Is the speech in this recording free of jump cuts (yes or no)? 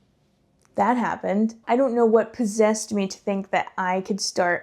no